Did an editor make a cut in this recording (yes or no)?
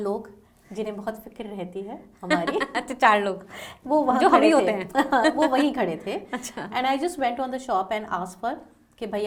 no